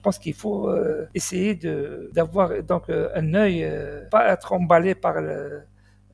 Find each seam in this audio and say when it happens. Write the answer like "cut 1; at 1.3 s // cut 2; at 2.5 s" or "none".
cut 1; at 1.1 s // cut 2; at 2.0 s // cut 3; at 4.0 s